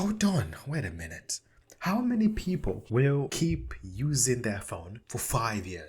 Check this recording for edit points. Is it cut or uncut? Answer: cut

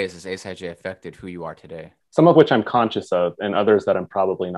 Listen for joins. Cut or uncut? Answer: cut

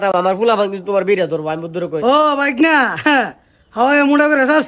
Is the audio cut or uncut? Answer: cut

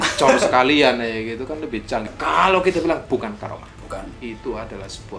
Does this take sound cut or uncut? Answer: cut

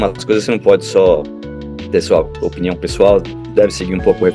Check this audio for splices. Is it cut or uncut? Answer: uncut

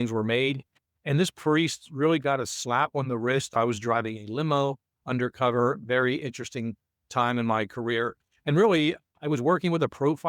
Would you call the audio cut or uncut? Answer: cut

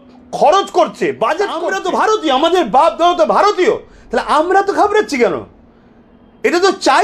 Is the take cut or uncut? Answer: cut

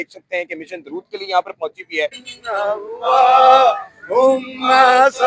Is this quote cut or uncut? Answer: cut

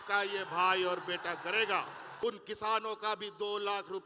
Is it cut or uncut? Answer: cut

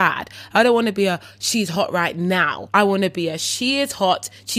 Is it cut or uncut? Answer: cut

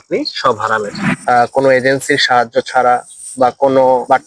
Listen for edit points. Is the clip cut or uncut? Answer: cut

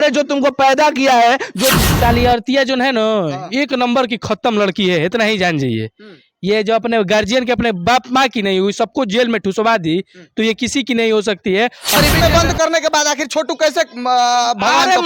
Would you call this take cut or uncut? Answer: cut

